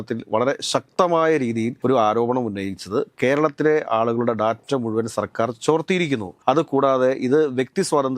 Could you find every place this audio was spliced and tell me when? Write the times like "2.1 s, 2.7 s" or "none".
1.7 s, 6.3 s